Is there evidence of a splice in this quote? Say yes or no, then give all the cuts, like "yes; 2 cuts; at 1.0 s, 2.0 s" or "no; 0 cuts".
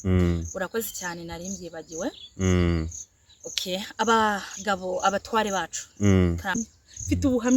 yes; 1 cut; at 6.4 s